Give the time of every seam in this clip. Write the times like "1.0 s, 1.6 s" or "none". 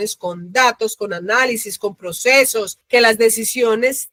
none